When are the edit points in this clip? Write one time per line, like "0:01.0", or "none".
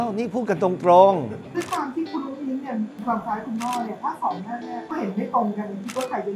0:01.4